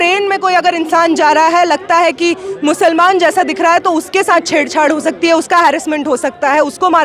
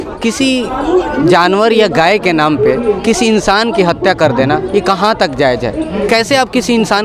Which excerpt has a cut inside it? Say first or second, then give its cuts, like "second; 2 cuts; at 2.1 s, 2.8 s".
second; 1 cut; at 6.0 s